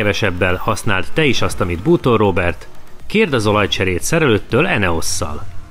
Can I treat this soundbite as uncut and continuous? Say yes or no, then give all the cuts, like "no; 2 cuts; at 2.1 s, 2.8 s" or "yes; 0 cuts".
yes; 0 cuts